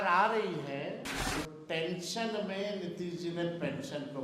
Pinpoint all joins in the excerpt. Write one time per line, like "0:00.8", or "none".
0:01.2